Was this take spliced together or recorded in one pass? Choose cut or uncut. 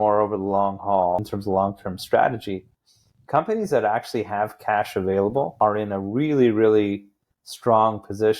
cut